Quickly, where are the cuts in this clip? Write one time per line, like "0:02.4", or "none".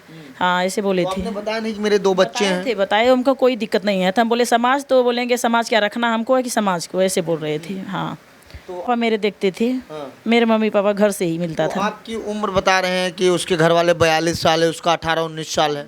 0:08.9